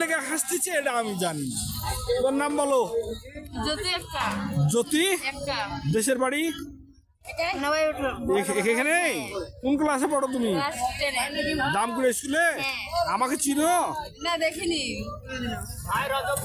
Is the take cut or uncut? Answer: uncut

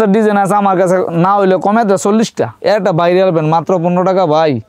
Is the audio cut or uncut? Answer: cut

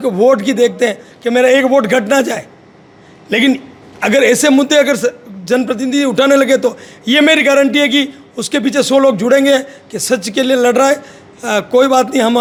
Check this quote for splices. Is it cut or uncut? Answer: uncut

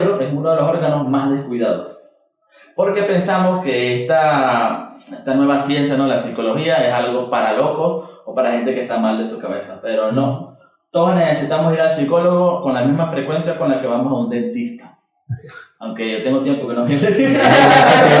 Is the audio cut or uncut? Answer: uncut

